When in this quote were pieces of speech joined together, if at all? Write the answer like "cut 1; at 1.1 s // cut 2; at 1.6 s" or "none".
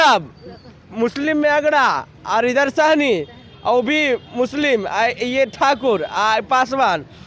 none